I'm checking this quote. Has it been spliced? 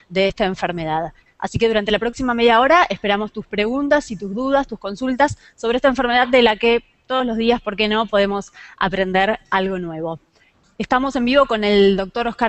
no; 0 cuts

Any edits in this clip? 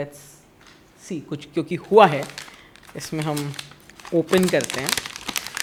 no; 0 cuts

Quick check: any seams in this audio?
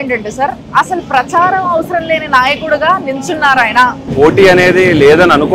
yes; 1 cut; at 4.1 s

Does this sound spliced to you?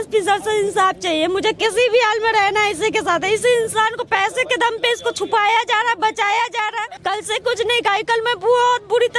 yes; 1 cut; at 7.0 s

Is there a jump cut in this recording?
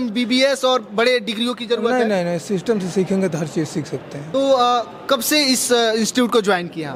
no; 0 cuts

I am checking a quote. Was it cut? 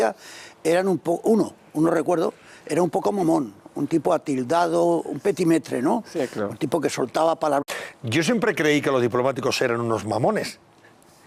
no; 0 cuts

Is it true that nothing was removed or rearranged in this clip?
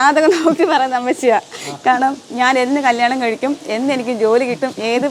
yes; 0 cuts

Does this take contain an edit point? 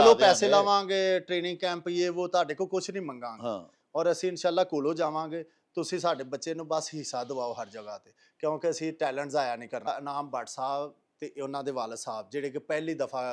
yes; 1 cut; at 9.9 s

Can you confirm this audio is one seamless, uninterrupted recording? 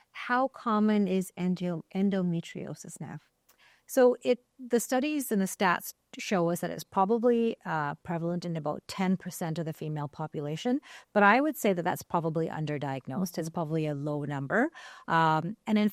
yes; 0 cuts

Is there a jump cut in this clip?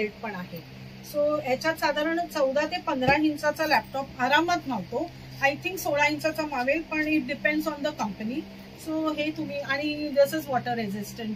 no; 0 cuts

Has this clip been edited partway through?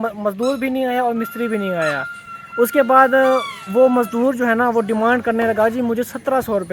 no; 0 cuts

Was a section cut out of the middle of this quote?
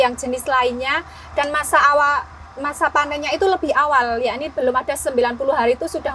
no; 0 cuts

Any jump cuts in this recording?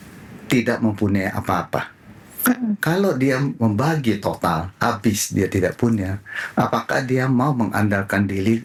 no; 0 cuts

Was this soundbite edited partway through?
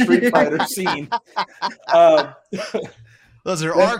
no; 0 cuts

